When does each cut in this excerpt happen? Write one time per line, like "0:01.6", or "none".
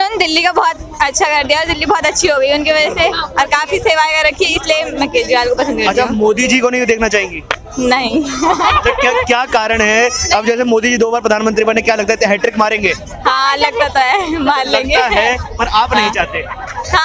none